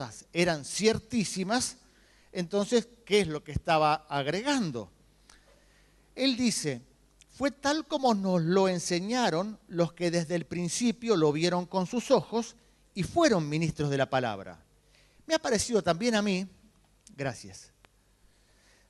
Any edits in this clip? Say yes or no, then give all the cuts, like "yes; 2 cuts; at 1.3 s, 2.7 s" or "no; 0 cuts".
no; 0 cuts